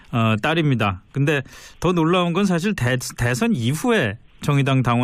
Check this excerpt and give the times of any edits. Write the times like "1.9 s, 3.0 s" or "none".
none